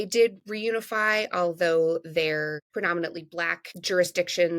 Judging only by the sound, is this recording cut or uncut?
cut